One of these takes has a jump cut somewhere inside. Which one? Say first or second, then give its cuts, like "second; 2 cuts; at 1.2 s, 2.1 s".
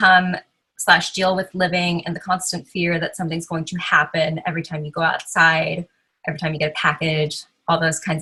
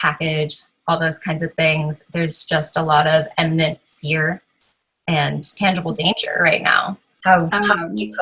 second; 2 cuts; at 5.5 s, 7.1 s